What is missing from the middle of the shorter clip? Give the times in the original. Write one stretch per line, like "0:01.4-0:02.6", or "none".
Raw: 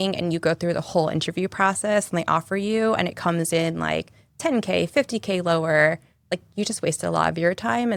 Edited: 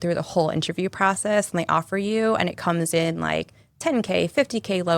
none